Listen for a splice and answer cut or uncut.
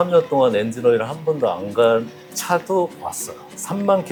uncut